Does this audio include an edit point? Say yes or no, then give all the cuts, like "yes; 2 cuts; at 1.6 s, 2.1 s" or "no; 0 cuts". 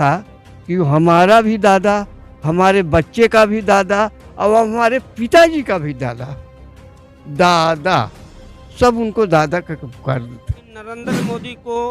yes; 1 cut; at 11.0 s